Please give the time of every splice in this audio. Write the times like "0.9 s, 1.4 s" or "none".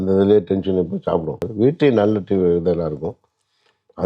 1.4 s